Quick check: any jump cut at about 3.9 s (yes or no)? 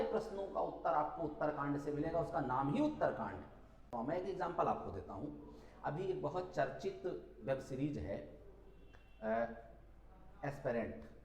yes